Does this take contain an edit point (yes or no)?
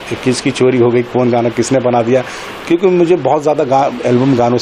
no